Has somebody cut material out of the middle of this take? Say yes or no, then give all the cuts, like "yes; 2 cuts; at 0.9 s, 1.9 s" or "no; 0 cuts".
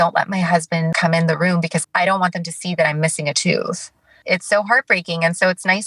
yes; 3 cuts; at 0.9 s, 1.8 s, 4.2 s